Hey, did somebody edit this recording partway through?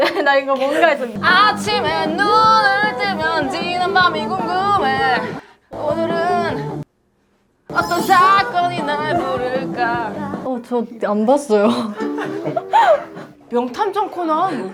no; 0 cuts

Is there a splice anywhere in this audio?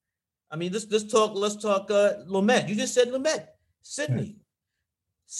no; 0 cuts

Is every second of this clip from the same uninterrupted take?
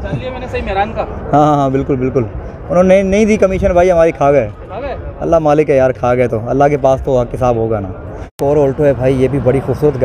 no; 1 cut; at 8.4 s

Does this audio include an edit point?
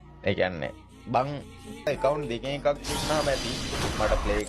yes; 1 cut; at 1.9 s

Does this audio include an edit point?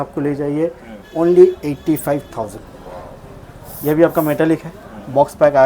no; 0 cuts

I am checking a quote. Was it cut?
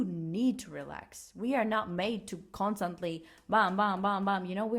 no; 0 cuts

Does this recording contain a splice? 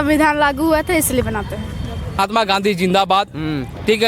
yes; 1 cut; at 2.2 s

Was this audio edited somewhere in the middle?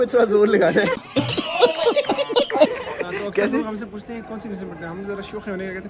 no; 0 cuts

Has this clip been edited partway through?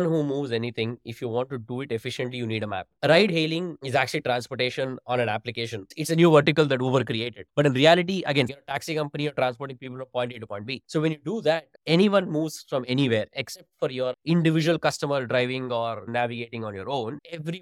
yes; 4 cuts; at 3.0 s, 3.8 s, 8.5 s, 16.1 s

